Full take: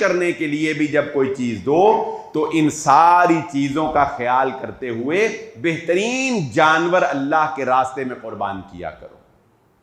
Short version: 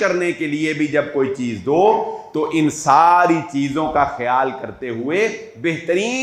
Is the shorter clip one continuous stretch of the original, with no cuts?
yes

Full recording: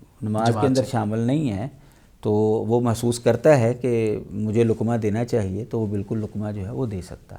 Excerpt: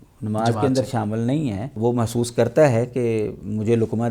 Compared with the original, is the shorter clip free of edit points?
no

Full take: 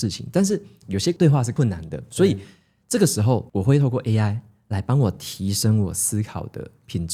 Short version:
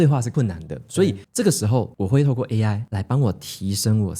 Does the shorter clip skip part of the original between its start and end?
yes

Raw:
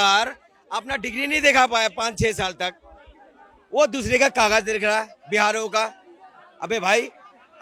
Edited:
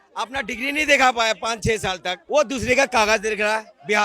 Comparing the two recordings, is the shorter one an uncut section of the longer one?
no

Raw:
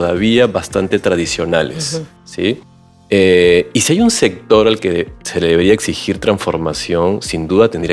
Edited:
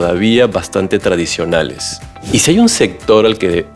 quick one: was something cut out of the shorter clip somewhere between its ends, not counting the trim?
yes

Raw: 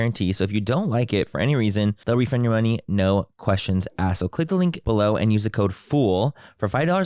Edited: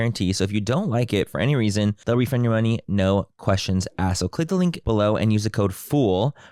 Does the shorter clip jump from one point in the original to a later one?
no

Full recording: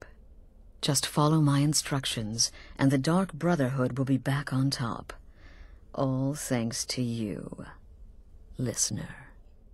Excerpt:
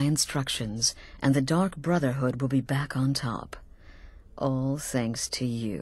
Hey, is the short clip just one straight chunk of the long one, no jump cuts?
yes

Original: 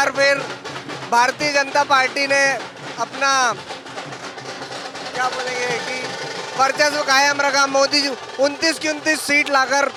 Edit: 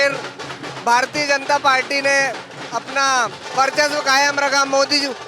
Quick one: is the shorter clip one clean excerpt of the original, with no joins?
no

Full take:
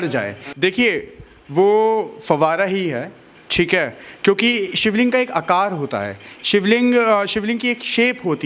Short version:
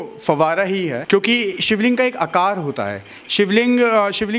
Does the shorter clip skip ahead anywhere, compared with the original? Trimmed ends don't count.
yes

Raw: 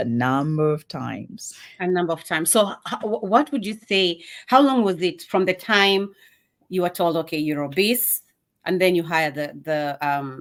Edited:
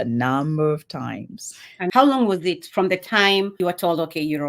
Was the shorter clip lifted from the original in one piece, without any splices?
no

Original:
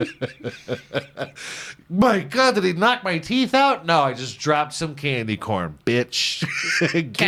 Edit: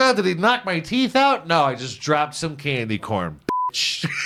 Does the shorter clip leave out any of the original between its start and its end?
no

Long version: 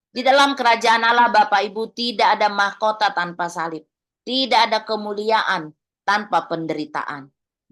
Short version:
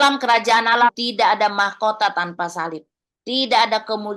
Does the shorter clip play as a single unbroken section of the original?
no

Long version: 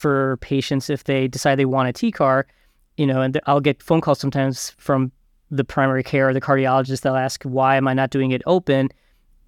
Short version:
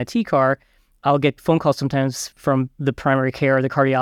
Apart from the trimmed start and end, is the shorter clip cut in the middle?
yes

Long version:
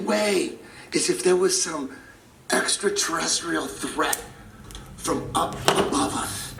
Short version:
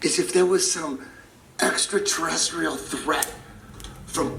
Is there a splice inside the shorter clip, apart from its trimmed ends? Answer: no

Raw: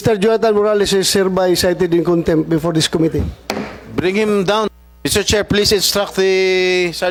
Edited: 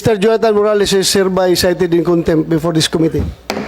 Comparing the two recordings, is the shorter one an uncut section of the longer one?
yes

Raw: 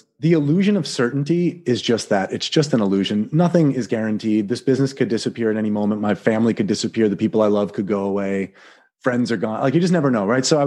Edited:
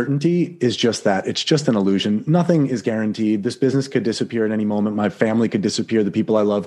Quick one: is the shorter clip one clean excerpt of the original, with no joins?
yes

